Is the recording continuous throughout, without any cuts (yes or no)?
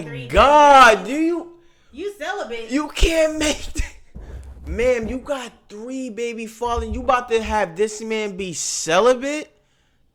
yes